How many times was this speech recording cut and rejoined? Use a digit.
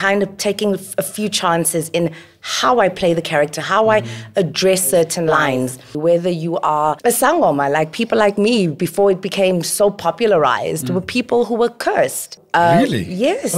3